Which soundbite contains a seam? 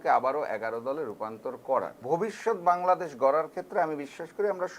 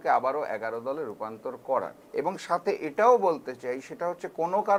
first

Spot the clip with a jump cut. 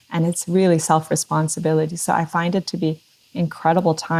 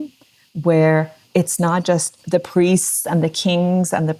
second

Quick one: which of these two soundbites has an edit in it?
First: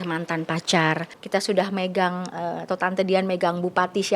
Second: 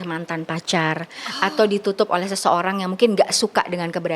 first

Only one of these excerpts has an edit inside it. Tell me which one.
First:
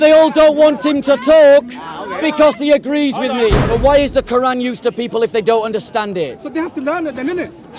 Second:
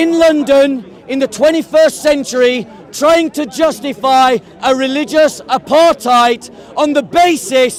first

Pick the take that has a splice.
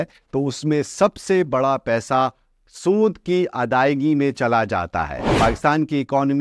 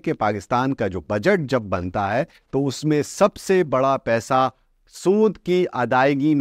first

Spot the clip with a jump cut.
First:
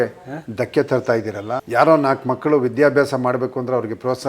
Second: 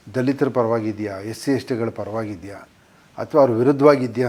first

